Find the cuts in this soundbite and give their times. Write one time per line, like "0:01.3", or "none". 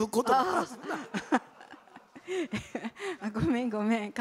none